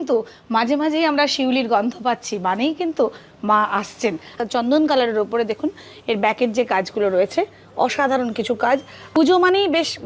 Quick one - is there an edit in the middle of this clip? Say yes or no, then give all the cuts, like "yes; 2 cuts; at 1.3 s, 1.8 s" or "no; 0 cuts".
yes; 2 cuts; at 4.4 s, 9.0 s